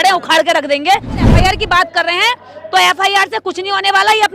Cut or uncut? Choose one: cut